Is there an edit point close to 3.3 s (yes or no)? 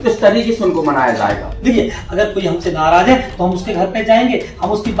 no